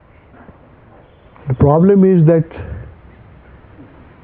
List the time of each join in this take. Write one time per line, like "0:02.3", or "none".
0:01.2